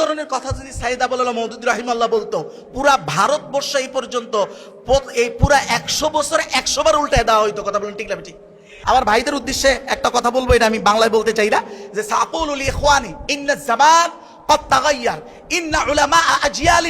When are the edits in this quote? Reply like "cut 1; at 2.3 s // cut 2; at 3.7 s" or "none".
cut 1; at 8.7 s